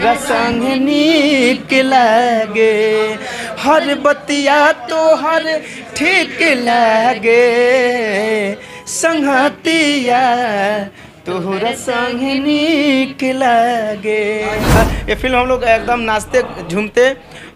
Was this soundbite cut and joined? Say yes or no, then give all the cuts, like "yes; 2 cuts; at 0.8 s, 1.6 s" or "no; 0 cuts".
yes; 1 cut; at 14.8 s